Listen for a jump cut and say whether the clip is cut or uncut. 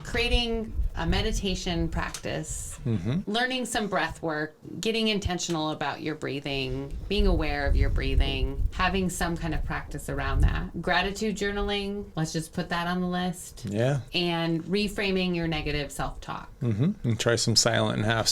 cut